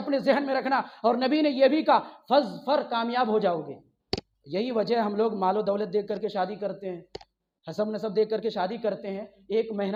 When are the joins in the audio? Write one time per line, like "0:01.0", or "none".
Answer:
none

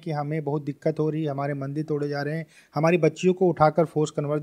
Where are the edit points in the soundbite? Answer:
none

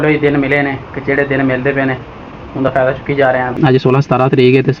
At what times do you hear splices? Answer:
0:03.5

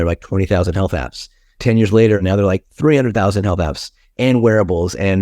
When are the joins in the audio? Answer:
0:02.2

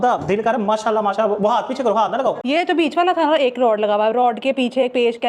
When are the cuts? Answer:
0:02.4

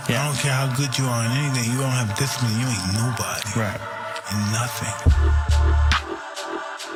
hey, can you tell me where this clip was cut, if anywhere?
none

